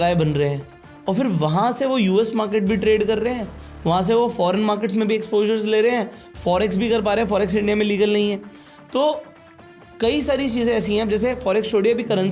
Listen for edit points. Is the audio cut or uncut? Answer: uncut